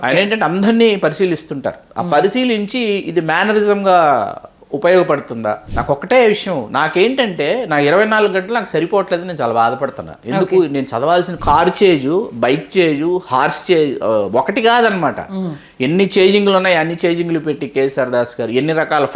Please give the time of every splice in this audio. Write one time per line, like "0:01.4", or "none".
0:05.7
0:11.4